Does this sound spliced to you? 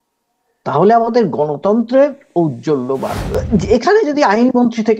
yes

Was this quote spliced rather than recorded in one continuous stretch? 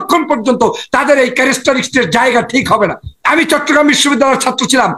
yes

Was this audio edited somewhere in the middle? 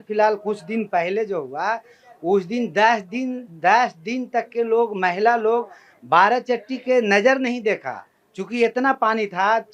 no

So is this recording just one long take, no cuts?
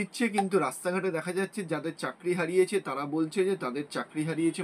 yes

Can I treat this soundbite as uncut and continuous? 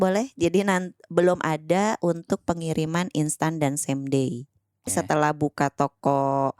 no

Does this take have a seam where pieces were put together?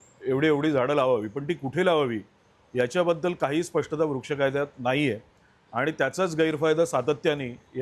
no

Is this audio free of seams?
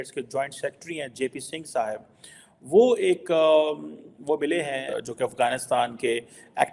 no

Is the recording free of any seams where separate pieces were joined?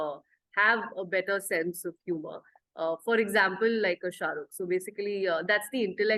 yes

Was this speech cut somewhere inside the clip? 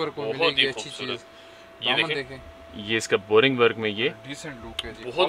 no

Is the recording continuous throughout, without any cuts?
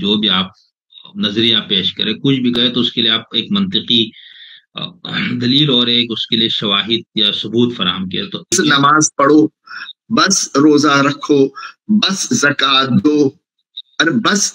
no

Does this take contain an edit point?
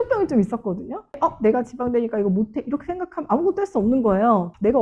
yes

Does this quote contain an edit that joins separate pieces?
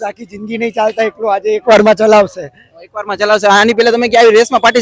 no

